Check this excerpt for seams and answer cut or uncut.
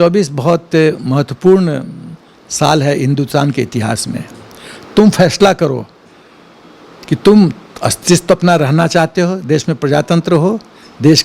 uncut